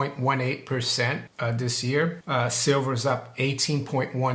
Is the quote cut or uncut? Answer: cut